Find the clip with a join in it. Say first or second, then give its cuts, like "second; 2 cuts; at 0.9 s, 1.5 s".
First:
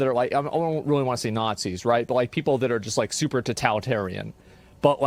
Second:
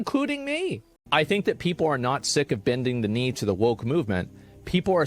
second; 1 cut; at 0.9 s